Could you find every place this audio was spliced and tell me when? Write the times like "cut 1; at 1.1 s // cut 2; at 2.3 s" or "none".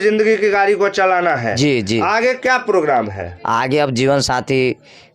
none